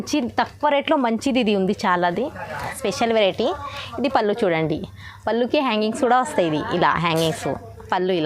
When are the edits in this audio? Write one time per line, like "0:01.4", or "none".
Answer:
0:02.8

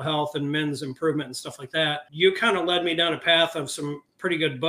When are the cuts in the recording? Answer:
0:02.1

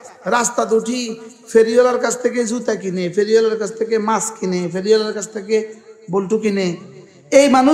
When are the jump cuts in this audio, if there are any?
none

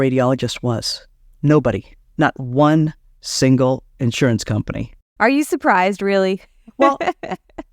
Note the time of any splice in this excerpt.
0:05.1

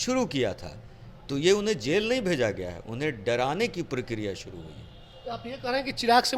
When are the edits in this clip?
none

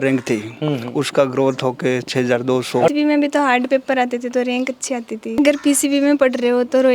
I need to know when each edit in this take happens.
0:02.9
0:05.4

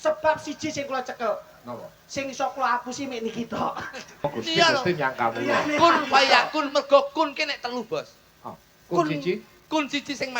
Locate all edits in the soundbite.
0:04.2

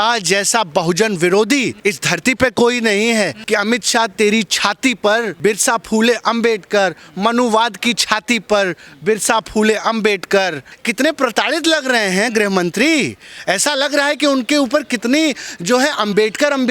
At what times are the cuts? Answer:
0:01.7
0:03.4
0:05.3
0:10.7

